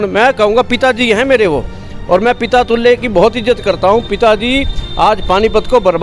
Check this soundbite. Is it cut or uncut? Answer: uncut